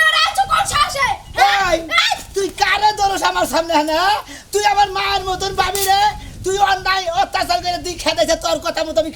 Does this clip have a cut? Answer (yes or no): no